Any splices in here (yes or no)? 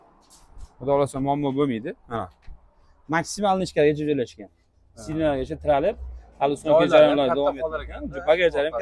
no